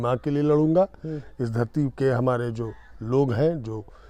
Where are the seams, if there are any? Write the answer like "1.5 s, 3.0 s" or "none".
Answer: none